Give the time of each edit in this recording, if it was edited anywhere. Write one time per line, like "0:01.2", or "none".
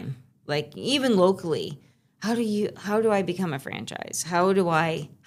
none